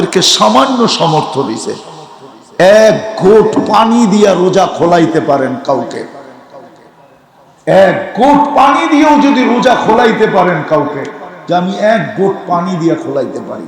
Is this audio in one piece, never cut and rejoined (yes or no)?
yes